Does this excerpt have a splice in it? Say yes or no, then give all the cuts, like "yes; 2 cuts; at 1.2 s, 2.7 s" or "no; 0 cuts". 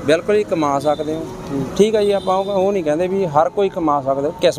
no; 0 cuts